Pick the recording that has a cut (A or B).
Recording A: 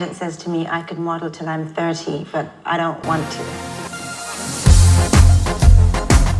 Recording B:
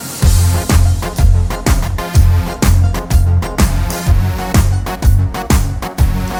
A